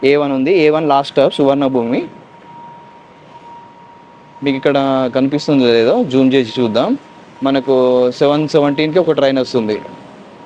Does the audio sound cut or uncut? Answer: uncut